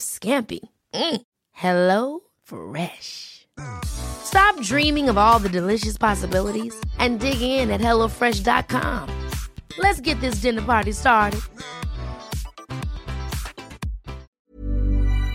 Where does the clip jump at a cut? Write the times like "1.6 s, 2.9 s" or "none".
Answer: 14.4 s